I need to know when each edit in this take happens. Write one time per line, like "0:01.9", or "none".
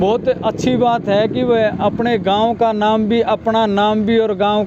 none